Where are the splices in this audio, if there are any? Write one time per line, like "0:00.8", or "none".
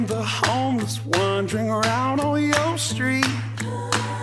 none